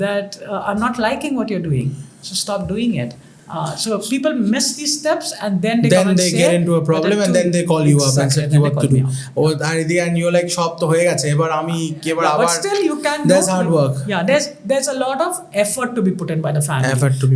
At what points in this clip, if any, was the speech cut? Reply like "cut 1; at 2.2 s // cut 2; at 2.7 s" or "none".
none